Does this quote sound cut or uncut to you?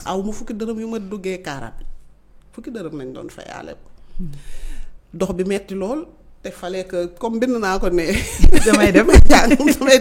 uncut